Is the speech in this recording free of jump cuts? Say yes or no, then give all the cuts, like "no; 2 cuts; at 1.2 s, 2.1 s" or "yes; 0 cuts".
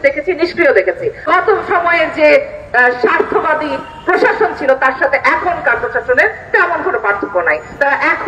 no; 1 cut; at 1.2 s